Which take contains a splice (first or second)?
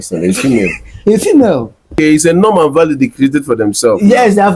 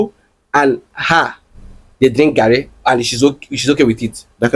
first